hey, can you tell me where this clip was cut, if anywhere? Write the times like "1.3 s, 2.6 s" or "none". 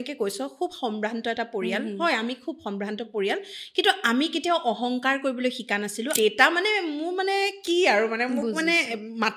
6.2 s